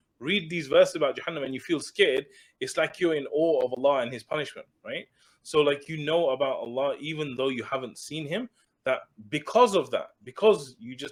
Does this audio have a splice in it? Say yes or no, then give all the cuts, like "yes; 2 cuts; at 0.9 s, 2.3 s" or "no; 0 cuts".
no; 0 cuts